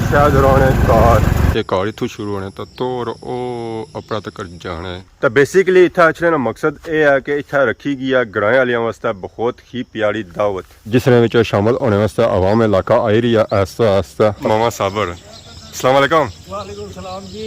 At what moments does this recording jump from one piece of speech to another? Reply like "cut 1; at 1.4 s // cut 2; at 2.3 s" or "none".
cut 1; at 1.5 s // cut 2; at 4.9 s // cut 3; at 14.4 s